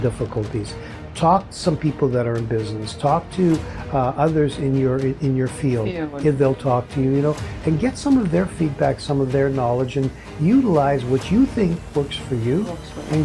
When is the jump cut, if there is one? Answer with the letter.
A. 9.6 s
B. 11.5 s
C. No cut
C